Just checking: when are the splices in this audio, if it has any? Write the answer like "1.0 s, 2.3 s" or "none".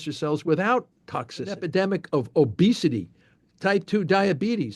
1.6 s